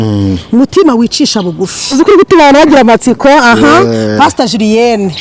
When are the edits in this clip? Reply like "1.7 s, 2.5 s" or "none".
1.9 s